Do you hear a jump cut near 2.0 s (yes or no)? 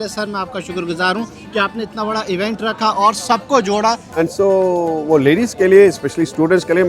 no